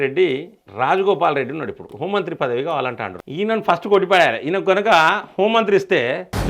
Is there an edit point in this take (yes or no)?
yes